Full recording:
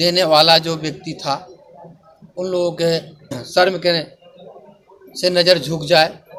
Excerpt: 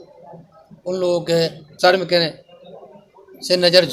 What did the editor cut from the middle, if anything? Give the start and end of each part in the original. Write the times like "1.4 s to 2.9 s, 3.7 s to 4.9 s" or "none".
3.2 s to 3.4 s